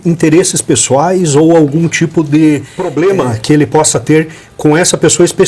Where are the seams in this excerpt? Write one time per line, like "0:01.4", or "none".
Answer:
0:02.8